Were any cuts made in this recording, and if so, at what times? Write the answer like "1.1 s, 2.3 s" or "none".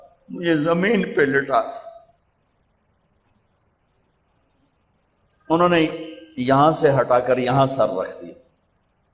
none

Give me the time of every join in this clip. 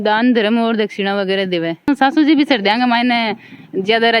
1.9 s

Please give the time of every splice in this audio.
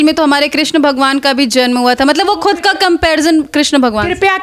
none

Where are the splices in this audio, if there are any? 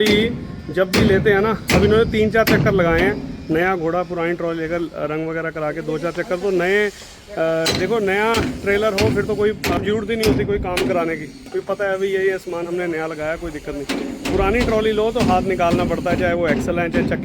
9.8 s

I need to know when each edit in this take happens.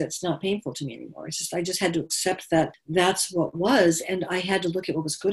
2.8 s

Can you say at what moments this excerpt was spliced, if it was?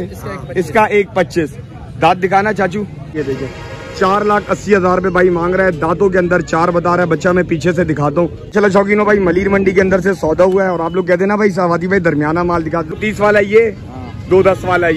3.1 s, 8.4 s, 13.0 s

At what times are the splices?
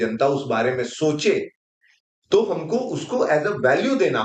none

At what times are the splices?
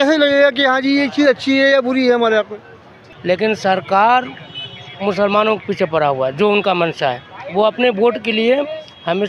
none

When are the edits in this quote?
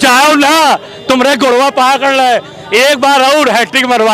none

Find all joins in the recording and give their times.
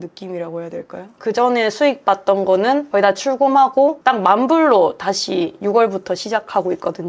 1.1 s

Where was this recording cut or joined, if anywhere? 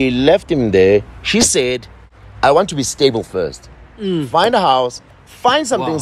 none

